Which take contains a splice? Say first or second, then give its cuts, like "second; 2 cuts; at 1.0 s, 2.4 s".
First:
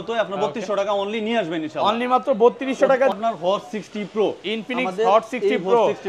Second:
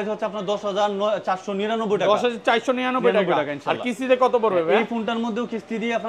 first; 1 cut; at 3.1 s